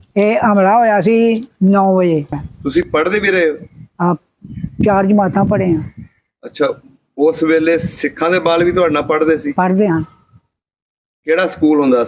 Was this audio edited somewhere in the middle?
yes; 1 cut; at 2.5 s

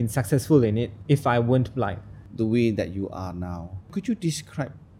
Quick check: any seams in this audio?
no; 0 cuts

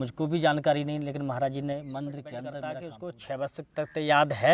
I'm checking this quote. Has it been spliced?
yes; 1 cut; at 2.6 s

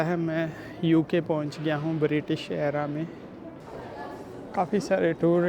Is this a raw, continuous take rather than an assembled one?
no; 1 cut; at 3.6 s

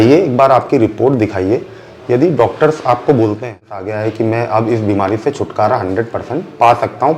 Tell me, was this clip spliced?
yes; 1 cut; at 3.8 s

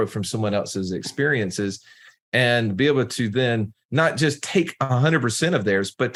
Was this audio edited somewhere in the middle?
no; 0 cuts

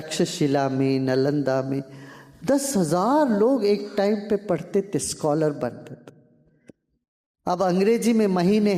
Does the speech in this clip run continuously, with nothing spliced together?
yes; 0 cuts

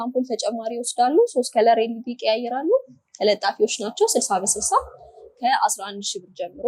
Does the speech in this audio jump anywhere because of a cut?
no; 0 cuts

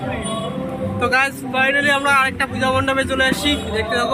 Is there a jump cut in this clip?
no; 0 cuts

